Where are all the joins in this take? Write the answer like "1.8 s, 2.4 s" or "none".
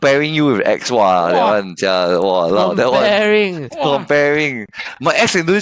none